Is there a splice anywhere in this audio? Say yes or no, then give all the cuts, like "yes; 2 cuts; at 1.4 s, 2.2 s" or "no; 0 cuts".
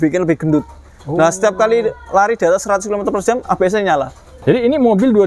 yes; 1 cut; at 4.3 s